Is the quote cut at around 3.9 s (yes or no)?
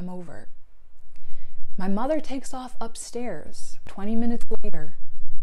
yes